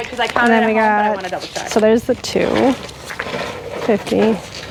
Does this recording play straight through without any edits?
yes; 0 cuts

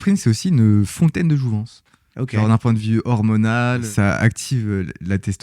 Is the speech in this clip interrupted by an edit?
yes; 1 cut; at 3.9 s

